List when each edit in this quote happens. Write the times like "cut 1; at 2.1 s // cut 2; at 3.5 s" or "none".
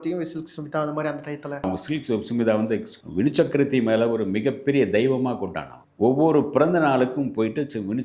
cut 1; at 1.7 s